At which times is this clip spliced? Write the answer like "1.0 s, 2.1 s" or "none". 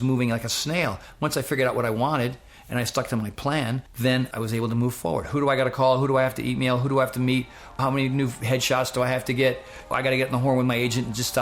4.2 s, 7.8 s, 9.9 s